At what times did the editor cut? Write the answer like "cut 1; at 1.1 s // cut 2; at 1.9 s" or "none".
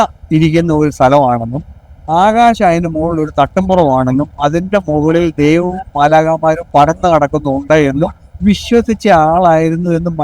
none